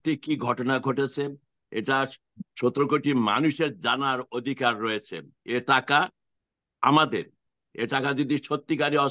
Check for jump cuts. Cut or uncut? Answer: uncut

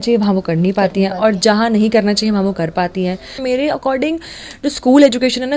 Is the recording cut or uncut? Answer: cut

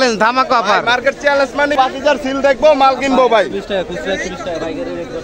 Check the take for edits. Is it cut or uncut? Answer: cut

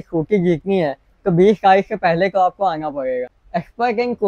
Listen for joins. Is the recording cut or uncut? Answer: cut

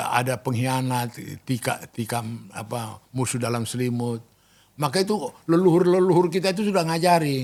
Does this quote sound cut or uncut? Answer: uncut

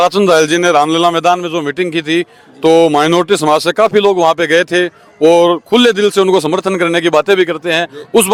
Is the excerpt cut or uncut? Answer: uncut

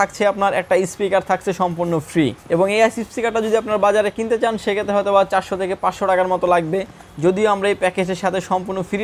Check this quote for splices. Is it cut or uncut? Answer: uncut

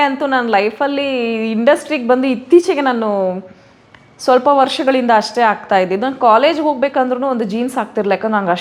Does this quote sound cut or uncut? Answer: uncut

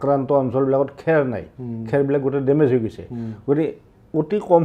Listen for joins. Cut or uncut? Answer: uncut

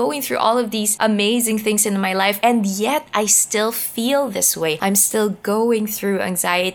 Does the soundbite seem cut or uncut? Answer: cut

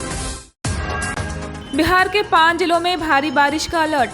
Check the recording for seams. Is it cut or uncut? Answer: cut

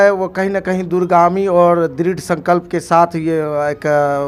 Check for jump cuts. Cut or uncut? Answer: uncut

